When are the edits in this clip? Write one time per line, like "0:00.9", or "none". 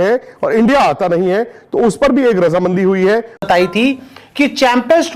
0:03.3